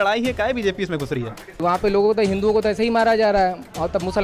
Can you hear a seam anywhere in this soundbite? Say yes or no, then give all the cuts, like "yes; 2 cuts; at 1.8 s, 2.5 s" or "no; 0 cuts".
yes; 1 cut; at 1.4 s